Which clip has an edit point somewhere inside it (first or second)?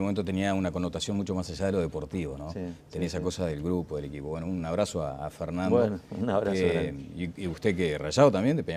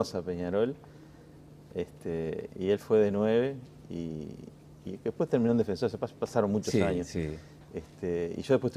first